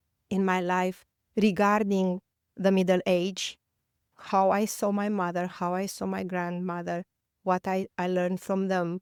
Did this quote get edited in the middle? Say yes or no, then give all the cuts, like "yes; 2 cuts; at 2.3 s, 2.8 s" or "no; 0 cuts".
no; 0 cuts